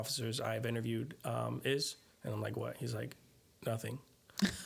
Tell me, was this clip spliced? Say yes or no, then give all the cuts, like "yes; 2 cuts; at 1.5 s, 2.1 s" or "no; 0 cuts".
no; 0 cuts